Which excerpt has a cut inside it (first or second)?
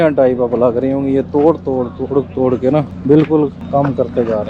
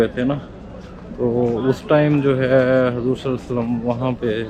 first